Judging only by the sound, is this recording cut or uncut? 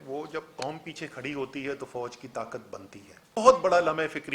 cut